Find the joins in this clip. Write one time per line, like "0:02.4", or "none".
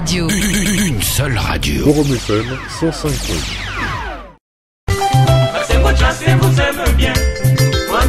0:04.3